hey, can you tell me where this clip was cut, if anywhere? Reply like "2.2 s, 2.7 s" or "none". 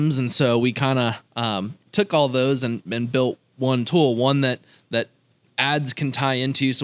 none